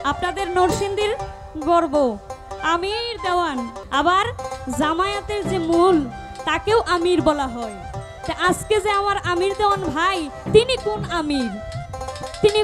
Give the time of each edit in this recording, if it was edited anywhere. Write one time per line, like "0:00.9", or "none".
0:03.8